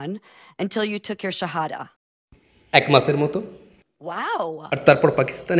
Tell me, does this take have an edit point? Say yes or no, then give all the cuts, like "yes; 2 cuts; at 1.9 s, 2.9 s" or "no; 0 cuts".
yes; 1 cut; at 4.6 s